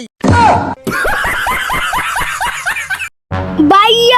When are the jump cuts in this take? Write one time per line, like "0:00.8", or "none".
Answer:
0:03.1